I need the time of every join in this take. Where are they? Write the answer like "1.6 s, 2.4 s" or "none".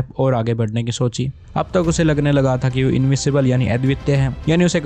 none